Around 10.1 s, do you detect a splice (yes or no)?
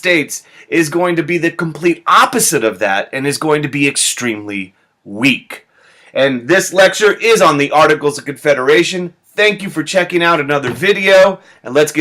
yes